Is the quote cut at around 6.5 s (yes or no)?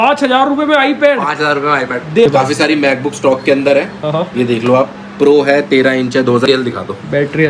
yes